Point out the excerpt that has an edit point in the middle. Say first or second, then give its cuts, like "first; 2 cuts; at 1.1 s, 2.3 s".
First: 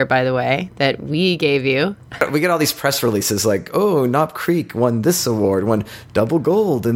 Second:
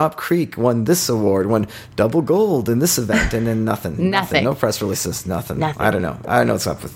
first; 1 cut; at 2.3 s